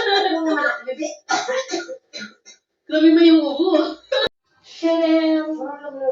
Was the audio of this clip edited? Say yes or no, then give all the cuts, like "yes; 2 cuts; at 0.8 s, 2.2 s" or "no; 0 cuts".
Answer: yes; 1 cut; at 4.3 s